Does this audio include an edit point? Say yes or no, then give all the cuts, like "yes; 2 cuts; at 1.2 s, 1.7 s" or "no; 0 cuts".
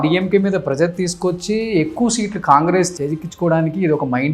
yes; 1 cut; at 3.0 s